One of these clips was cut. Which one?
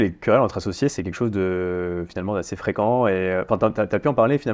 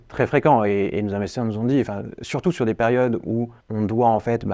second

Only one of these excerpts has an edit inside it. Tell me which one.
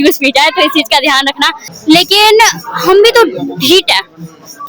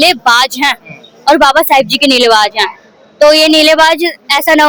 first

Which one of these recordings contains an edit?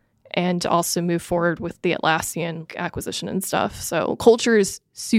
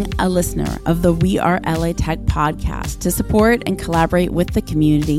first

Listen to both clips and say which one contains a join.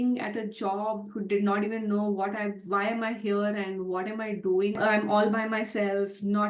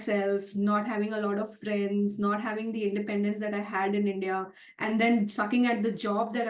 first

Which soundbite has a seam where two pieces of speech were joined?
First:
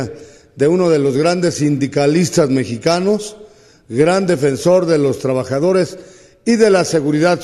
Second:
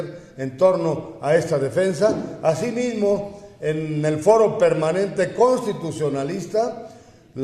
second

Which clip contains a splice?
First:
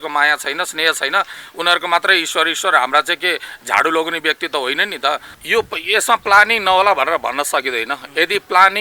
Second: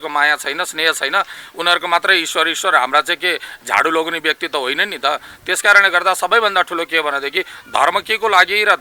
first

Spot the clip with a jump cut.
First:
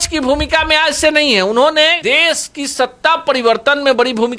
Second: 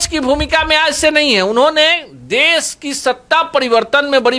first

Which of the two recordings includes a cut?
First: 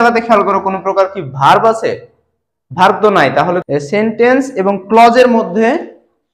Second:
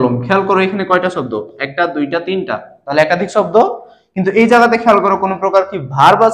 first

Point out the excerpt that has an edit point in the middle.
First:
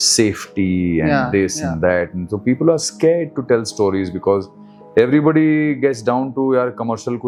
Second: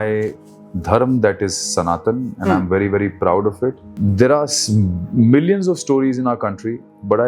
second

